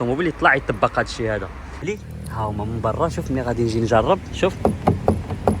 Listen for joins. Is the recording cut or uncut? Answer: cut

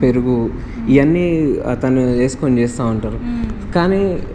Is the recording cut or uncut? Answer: uncut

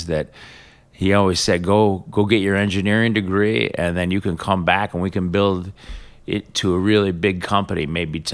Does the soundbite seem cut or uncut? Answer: uncut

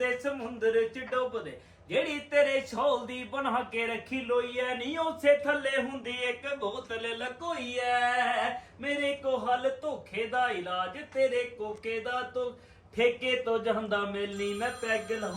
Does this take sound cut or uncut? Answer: uncut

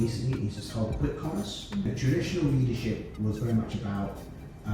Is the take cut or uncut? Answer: cut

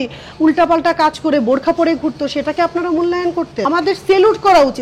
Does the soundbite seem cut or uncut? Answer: cut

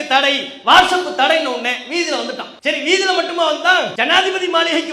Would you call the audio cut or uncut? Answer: cut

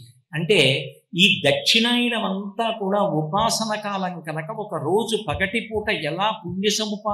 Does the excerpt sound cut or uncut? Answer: uncut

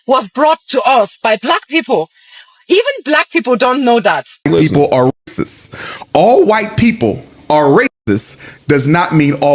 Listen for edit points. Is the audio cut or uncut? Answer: cut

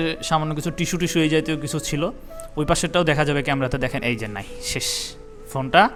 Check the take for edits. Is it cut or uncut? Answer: uncut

